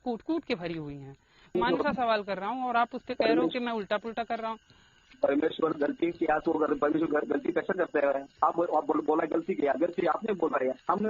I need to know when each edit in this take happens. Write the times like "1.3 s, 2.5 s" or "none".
1.6 s